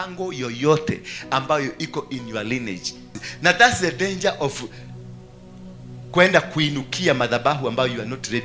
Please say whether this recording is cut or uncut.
cut